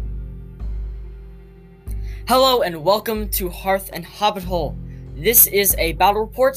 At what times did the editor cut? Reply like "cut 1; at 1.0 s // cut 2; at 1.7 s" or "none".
cut 1; at 1.1 s